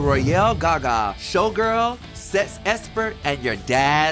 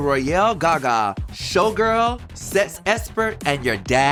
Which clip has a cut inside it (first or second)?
first